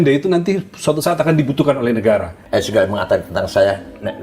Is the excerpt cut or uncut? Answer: cut